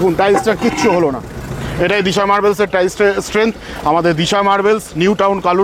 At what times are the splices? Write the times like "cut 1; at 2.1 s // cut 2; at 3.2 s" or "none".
none